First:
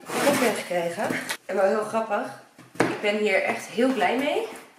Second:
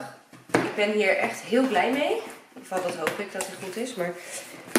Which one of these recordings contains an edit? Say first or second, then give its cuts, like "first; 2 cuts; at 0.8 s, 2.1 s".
first; 1 cut; at 1.3 s